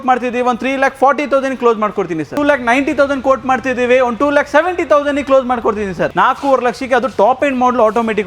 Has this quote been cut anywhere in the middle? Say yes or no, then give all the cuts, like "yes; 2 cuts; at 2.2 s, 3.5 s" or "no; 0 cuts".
yes; 2 cuts; at 2.3 s, 6.1 s